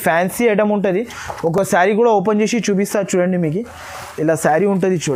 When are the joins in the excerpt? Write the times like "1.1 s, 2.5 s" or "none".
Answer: none